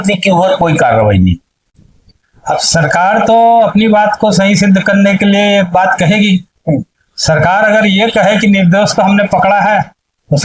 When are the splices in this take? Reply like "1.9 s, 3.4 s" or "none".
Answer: 1.9 s